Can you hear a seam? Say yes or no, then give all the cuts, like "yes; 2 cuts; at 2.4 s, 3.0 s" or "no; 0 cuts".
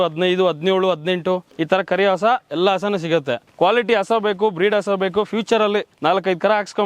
yes; 3 cuts; at 1.5 s, 3.4 s, 5.9 s